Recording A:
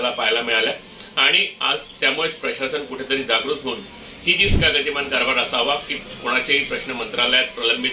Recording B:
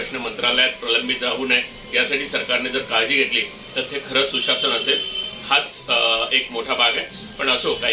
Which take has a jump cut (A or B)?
A